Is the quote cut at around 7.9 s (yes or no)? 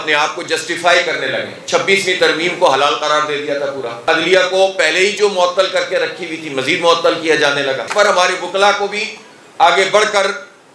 yes